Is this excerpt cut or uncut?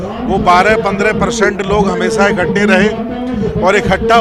uncut